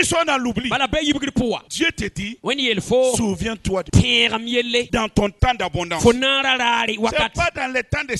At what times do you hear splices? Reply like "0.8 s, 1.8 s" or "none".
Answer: 1.7 s, 3.9 s, 4.9 s